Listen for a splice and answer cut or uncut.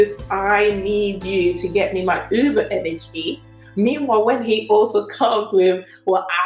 uncut